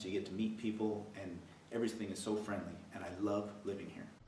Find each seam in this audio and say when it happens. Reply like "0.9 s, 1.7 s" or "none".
none